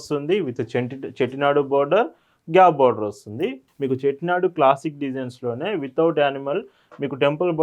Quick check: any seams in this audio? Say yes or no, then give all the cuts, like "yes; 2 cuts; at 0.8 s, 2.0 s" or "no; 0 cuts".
yes; 1 cut; at 3.6 s